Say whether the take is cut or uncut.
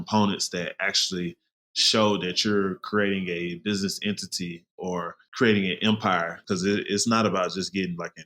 cut